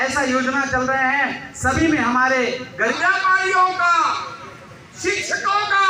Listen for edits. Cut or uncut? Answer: cut